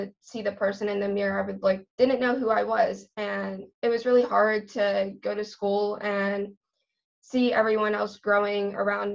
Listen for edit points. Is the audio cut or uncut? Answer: cut